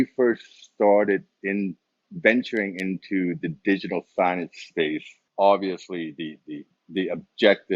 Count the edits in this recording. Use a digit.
1